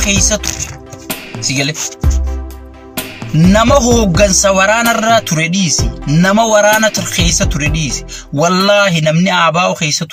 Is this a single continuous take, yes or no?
yes